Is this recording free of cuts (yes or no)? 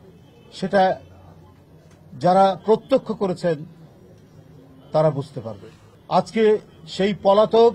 yes